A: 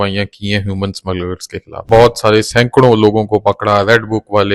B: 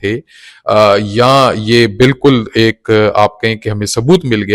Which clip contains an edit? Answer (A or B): A